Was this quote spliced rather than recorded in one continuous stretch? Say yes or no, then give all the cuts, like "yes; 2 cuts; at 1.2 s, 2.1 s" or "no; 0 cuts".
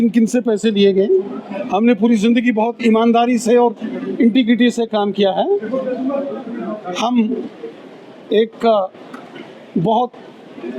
no; 0 cuts